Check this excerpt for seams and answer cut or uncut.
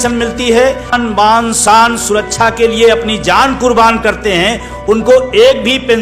cut